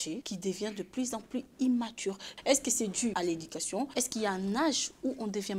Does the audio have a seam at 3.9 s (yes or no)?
yes